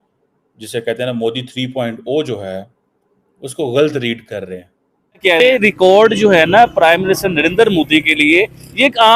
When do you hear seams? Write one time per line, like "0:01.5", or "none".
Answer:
0:05.4